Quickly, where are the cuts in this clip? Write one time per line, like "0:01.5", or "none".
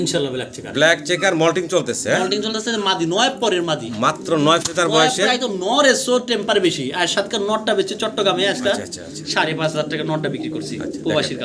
none